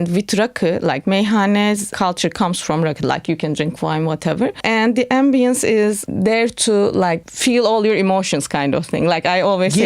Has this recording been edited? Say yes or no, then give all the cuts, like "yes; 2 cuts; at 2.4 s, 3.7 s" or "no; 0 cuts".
yes; 4 cuts; at 1.9 s, 4.6 s, 6.0 s, 7.3 s